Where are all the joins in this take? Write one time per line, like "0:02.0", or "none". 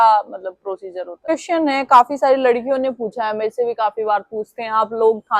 0:01.3

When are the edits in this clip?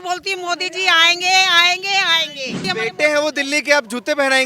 0:02.7

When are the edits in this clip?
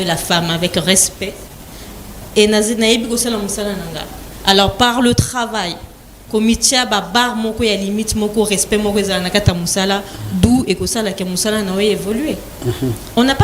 none

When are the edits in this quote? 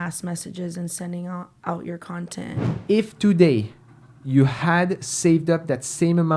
0:02.7

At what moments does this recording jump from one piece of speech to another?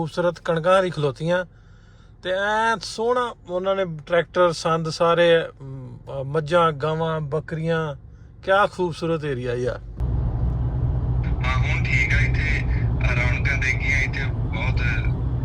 0:10.0

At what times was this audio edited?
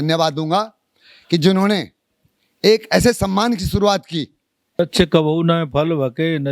0:04.8

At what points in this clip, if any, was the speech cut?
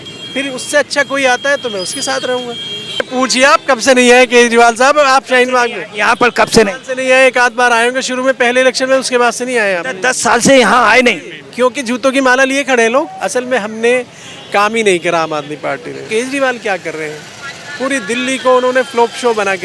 0:03.1
0:13.2
0:16.1

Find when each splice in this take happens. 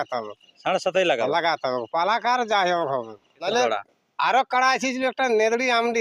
0:03.4

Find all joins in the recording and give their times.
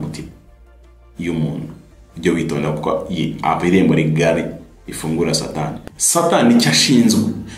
0:05.9

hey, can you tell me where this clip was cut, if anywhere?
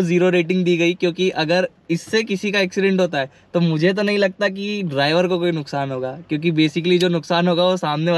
none

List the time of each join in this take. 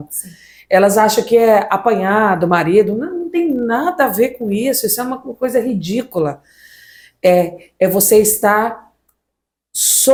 none

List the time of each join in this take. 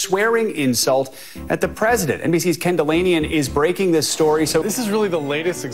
0:02.2
0:04.7

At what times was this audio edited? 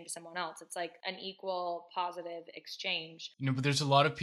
0:03.2

